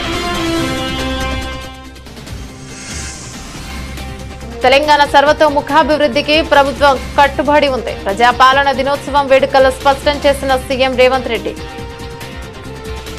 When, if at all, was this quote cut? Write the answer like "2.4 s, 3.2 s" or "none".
none